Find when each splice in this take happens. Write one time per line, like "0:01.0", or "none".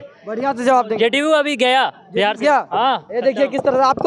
none